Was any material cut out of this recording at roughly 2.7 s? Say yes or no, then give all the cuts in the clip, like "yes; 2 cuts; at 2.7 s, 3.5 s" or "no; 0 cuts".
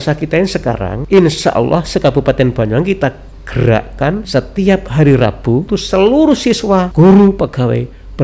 no; 4 cuts; at 0.9 s, 4.3 s, 5.7 s, 6.9 s